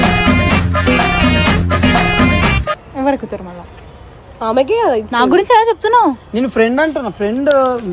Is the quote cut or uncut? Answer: uncut